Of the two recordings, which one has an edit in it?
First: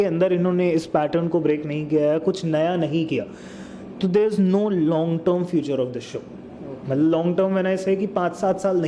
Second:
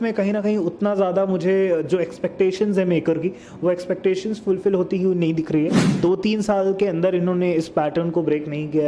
second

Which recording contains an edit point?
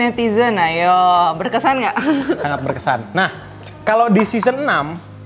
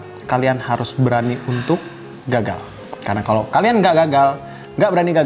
first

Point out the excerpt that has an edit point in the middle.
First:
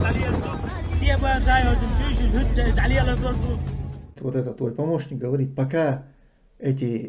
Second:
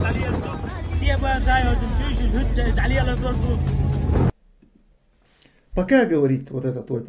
first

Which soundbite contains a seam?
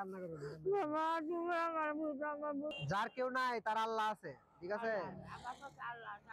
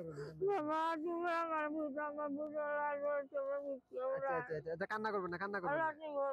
first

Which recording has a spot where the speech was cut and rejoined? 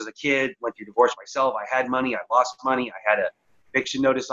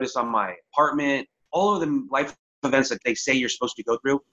second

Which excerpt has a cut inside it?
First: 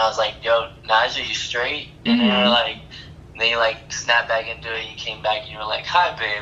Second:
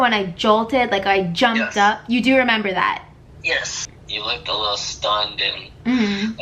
second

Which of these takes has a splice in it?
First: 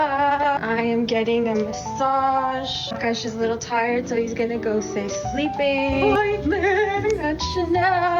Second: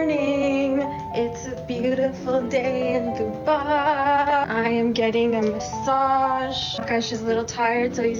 first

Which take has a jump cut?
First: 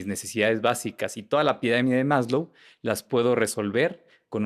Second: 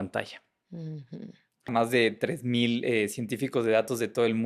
second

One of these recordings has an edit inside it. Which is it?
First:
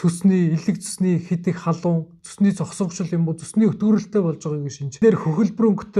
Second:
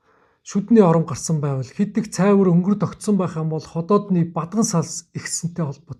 first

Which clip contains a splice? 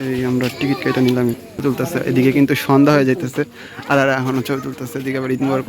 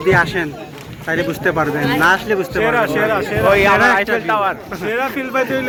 first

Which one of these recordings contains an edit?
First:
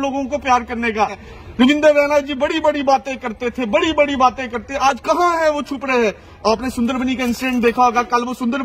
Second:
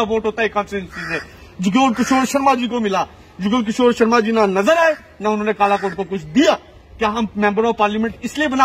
first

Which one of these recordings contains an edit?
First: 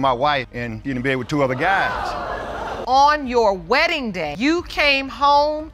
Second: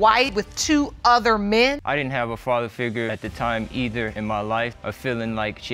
second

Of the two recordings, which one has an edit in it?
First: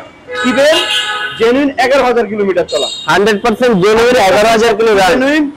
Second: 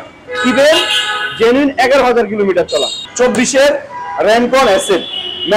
second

